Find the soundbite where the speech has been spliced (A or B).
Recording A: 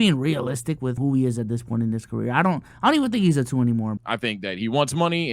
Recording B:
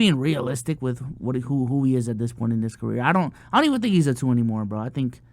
A